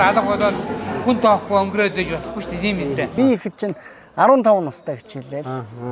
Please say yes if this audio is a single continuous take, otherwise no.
no